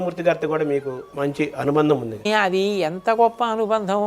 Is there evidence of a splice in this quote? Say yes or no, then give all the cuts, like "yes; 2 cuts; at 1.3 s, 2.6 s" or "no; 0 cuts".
yes; 2 cuts; at 1.0 s, 2.3 s